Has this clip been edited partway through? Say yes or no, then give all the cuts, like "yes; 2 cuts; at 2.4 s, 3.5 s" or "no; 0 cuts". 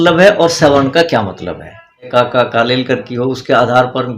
yes; 1 cut; at 2.1 s